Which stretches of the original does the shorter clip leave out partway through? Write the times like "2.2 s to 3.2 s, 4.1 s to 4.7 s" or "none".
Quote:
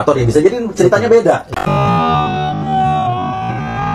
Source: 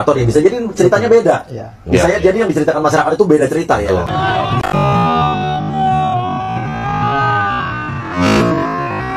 1.5 s to 4.6 s